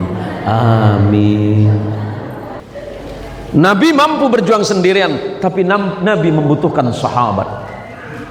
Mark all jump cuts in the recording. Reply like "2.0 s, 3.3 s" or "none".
2.5 s